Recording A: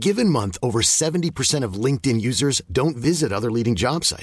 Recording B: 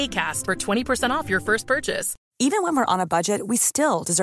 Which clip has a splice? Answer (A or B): B